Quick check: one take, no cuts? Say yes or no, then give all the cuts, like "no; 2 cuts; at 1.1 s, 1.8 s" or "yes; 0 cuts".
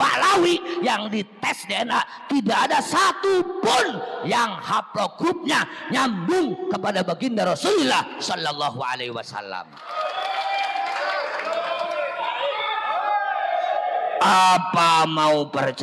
yes; 0 cuts